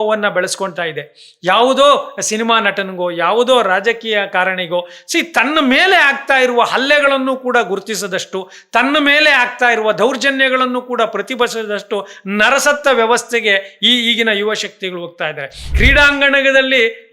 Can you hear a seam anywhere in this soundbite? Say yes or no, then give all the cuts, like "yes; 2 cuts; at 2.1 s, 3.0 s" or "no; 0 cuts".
yes; 1 cut; at 15.7 s